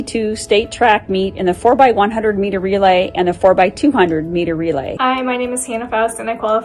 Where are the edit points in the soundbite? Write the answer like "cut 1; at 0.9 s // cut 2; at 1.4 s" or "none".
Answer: cut 1; at 4.9 s